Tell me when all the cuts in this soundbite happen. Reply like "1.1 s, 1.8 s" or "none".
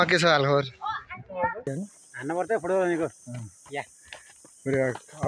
1.7 s